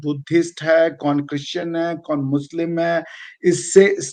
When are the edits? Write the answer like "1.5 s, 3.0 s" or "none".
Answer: none